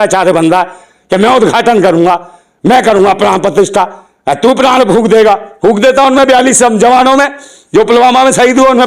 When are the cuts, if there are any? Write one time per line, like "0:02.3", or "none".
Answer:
none